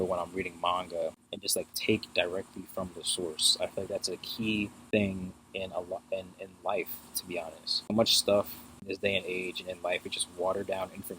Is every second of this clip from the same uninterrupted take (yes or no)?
no